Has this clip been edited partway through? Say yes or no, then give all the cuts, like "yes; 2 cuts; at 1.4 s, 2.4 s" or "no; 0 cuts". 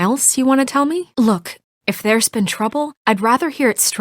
yes; 1 cut; at 1.1 s